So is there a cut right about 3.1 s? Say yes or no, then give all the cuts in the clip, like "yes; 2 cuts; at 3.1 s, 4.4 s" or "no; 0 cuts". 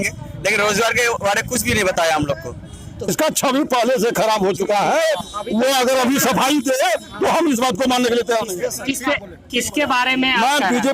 yes; 1 cut; at 3.1 s